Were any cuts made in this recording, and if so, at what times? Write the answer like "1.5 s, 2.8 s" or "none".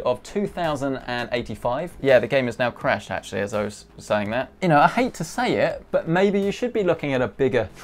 1.9 s, 4.5 s